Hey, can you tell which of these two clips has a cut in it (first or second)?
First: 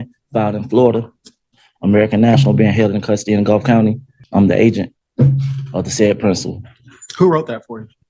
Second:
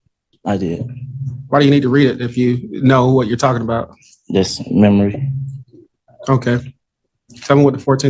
first